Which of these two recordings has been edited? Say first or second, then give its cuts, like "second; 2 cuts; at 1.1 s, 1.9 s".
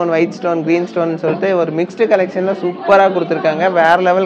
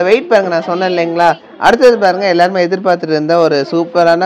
second; 1 cut; at 1.5 s